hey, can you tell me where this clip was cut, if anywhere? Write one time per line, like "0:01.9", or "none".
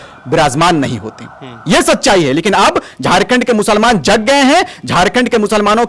none